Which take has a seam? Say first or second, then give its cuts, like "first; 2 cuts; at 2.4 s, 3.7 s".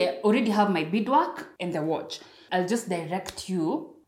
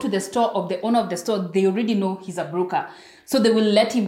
first; 2 cuts; at 1.5 s, 2.4 s